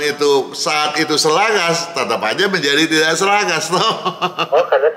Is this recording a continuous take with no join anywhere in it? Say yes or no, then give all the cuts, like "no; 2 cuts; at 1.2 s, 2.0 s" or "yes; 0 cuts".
yes; 0 cuts